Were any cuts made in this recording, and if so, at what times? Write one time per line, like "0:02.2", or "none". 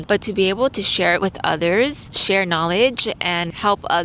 0:02.1